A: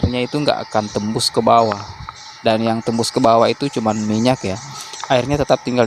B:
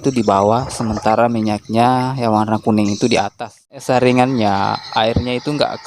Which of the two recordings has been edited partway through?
B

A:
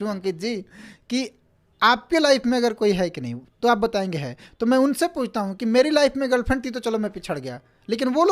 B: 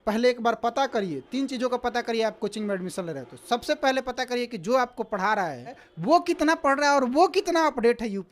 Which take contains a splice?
B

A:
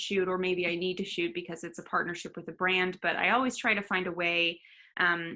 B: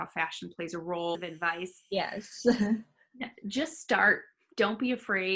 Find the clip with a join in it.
B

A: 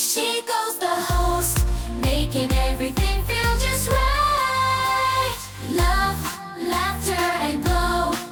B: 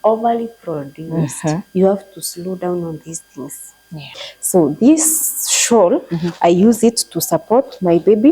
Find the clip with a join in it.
B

